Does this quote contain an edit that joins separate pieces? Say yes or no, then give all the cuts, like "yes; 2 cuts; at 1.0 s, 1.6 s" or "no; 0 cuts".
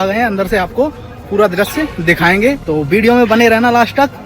yes; 1 cut; at 2.6 s